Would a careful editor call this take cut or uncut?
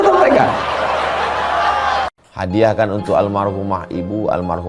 cut